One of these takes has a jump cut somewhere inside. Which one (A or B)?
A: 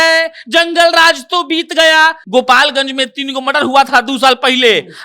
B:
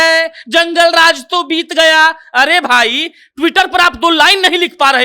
A